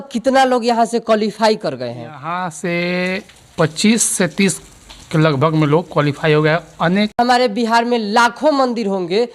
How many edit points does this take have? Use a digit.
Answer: 1